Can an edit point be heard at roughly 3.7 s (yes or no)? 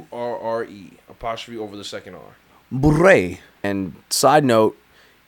yes